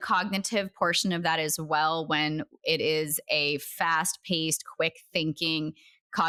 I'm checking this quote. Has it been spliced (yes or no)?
no